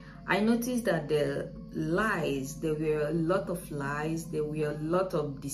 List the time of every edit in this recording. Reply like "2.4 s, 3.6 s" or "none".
none